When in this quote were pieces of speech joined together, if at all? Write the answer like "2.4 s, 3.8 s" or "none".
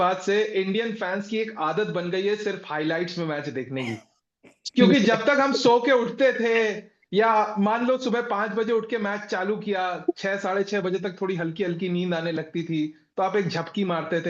none